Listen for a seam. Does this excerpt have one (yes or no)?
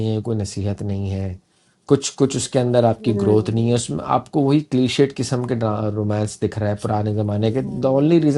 no